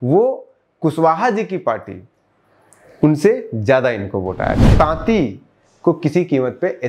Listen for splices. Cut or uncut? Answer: cut